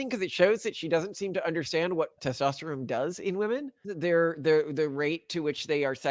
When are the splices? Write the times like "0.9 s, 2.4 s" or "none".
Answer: 3.9 s

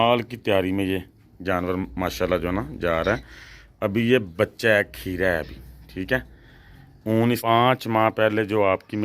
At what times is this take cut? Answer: 7.4 s

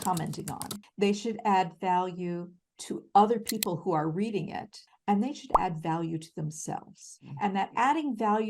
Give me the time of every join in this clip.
none

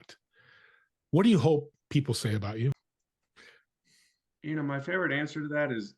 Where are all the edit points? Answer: 2.7 s

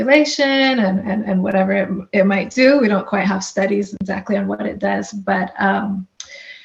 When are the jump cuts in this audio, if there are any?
none

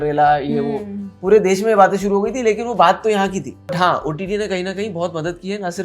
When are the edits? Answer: 3.7 s

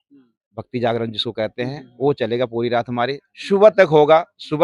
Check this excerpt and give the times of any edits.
none

